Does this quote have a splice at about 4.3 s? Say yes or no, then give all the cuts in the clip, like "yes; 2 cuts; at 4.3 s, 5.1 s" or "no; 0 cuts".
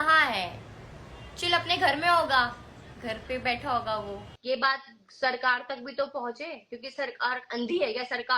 yes; 1 cut; at 4.3 s